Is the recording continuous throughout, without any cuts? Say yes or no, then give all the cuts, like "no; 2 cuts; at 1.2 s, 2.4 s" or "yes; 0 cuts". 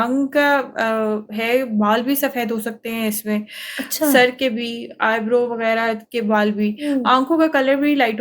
yes; 0 cuts